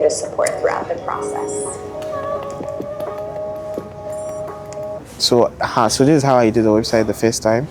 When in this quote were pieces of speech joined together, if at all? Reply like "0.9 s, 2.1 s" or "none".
5.0 s